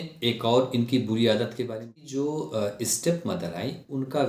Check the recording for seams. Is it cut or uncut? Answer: cut